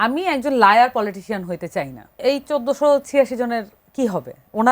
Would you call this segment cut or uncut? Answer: cut